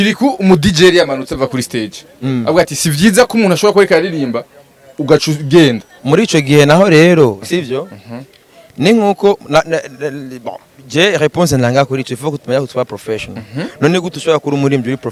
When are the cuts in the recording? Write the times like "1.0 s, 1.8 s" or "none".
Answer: none

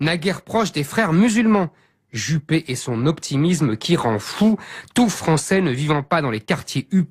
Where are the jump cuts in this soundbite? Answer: 2.1 s

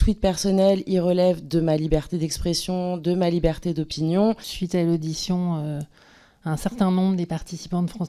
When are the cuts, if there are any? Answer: 4.5 s

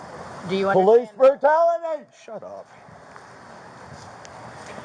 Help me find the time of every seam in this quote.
none

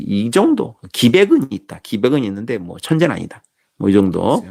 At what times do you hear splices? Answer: none

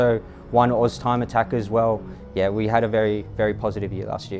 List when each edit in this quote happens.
2.1 s

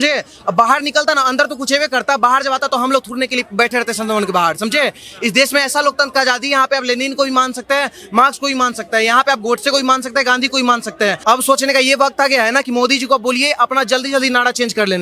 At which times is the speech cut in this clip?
11.2 s

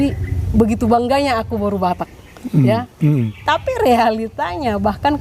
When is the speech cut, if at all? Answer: none

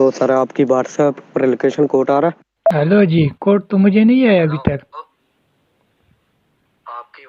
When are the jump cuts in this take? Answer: 2.7 s

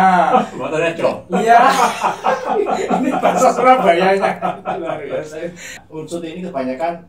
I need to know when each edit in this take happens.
5.8 s

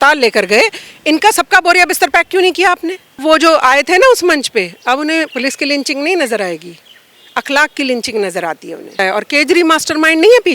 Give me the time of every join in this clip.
3.2 s, 9.0 s

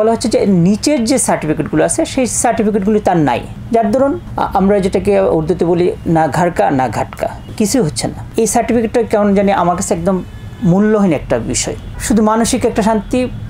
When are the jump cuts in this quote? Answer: 11.9 s

